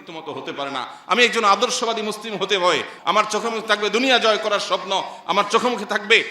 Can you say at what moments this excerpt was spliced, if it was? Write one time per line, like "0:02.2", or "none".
0:02.9